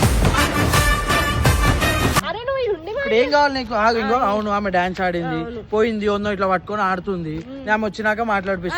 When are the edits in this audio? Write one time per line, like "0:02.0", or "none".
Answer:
0:02.2